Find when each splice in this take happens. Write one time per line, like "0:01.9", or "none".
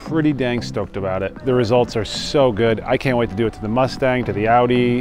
0:01.3